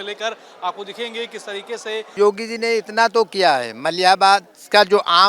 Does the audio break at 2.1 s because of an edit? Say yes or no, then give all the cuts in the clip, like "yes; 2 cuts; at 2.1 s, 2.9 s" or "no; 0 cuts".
yes; 1 cut; at 2.1 s